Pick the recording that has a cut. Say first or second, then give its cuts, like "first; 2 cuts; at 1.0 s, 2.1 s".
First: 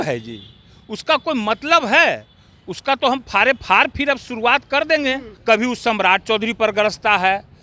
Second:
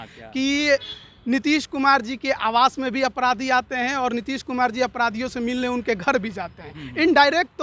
first; 1 cut; at 5.3 s